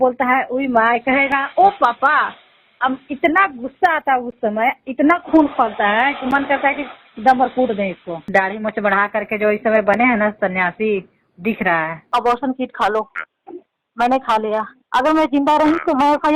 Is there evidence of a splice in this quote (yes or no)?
no